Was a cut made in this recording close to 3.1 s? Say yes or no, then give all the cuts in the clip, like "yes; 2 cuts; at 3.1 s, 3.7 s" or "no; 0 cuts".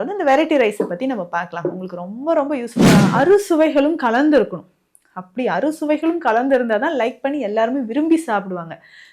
yes; 1 cut; at 3.1 s